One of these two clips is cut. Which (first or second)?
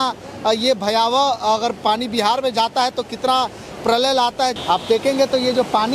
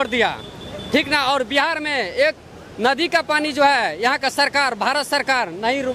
first